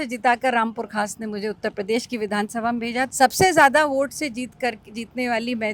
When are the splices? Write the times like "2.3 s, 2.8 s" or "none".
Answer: 3.1 s

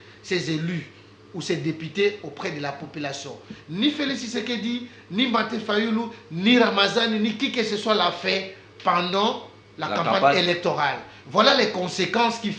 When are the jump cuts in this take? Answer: none

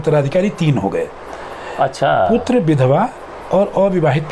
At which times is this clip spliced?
none

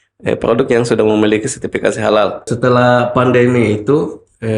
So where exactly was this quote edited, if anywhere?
2.5 s

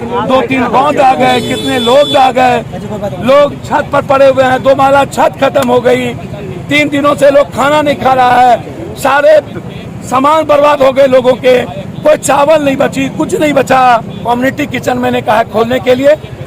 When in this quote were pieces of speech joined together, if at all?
14.2 s

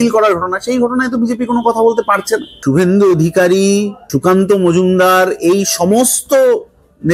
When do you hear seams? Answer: 2.5 s

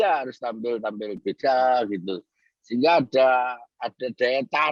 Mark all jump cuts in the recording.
none

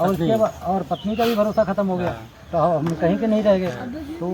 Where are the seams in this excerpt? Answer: none

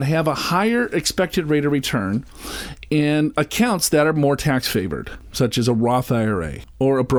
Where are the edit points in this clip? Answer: none

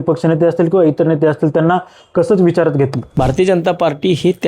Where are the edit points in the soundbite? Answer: 3.0 s

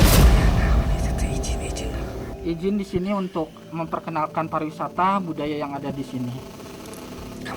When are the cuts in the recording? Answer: 2.3 s

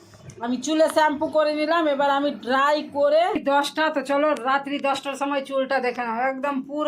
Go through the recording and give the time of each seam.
3.4 s

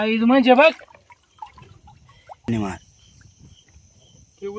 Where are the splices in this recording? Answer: 2.5 s

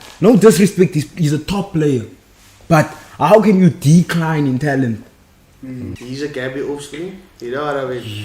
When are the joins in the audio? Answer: 6.0 s

